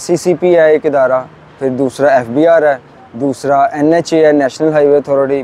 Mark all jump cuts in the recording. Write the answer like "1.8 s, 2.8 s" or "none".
none